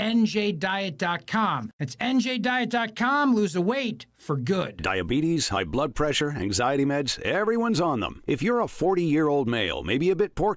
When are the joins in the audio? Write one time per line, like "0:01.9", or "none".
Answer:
none